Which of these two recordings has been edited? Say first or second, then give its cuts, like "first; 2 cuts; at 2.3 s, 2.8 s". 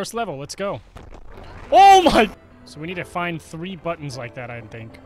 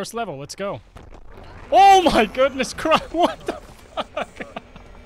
first; 1 cut; at 2.3 s